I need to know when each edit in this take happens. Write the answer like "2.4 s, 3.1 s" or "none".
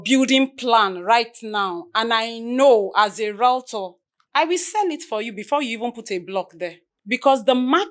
6.9 s